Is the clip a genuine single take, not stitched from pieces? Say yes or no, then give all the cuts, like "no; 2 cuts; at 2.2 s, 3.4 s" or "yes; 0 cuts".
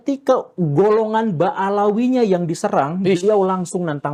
yes; 0 cuts